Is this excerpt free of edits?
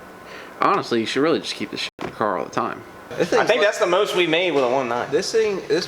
no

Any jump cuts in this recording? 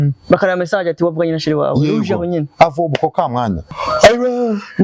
yes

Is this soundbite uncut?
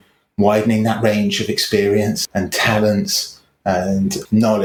yes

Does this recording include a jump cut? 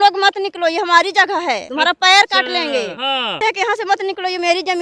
yes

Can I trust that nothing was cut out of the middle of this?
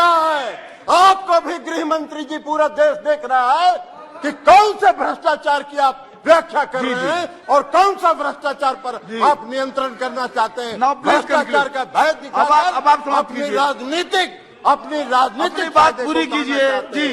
yes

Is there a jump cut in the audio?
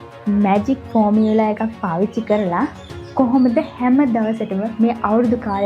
no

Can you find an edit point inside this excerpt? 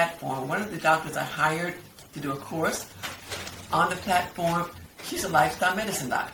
no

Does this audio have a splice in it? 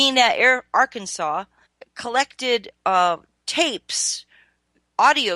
no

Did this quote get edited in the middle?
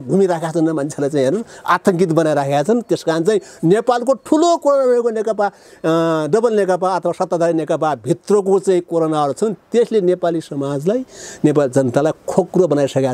no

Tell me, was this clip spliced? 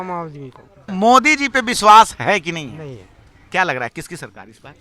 yes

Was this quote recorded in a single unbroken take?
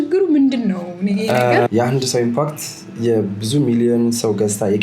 no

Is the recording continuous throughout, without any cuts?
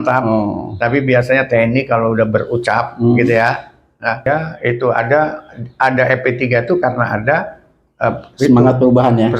no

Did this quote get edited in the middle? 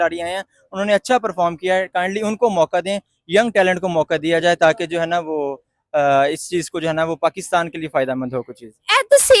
no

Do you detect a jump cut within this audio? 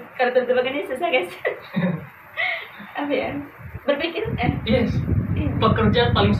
no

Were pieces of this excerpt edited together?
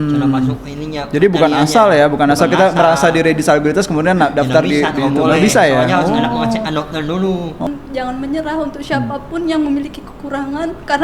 yes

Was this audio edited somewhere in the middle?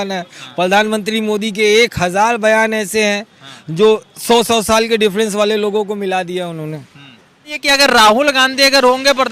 yes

